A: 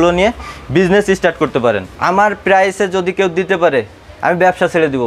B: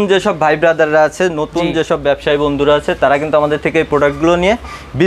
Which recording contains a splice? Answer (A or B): A